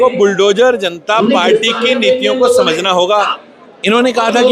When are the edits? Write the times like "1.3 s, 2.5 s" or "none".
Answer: 3.4 s